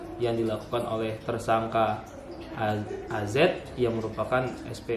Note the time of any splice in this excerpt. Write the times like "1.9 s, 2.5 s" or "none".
none

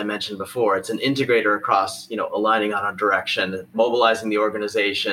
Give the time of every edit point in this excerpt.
3.7 s

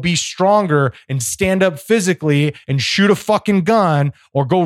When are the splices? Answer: none

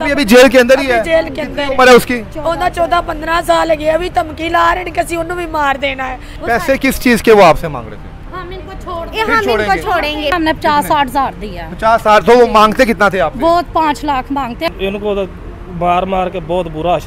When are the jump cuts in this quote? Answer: 6.3 s, 10.3 s, 14.7 s

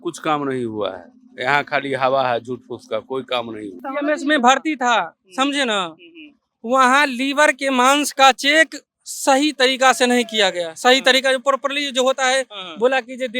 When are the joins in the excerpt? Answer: 3.9 s

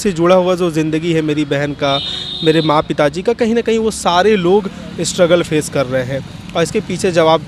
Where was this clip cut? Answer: none

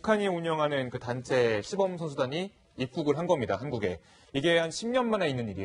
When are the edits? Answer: none

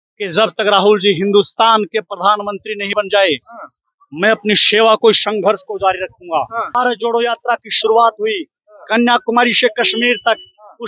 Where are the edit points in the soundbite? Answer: 6.8 s

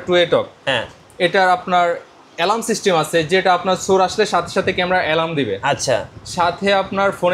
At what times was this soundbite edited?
none

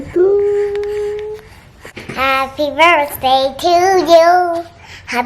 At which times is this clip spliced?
1.8 s

